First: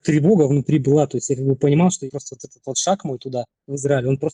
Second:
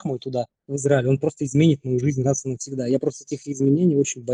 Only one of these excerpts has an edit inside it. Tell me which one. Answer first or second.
first